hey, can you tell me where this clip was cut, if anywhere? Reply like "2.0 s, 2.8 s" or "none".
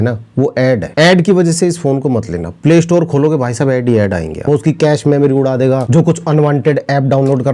4.4 s